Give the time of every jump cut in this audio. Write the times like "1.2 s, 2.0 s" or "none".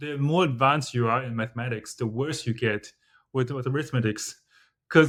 none